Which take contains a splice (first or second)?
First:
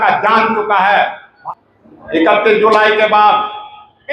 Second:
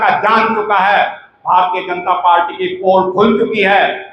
first